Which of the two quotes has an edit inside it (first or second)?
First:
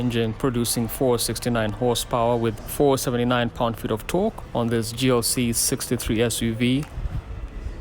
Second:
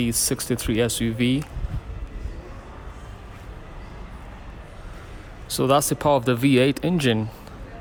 first